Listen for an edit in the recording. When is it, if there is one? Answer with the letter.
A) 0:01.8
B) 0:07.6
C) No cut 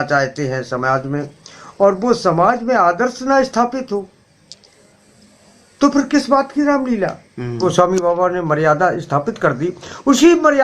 B